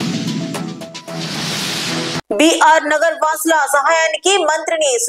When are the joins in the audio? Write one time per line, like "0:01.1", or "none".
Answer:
none